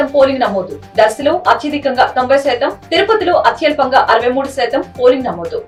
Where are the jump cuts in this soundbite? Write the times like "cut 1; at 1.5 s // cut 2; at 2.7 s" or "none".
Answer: none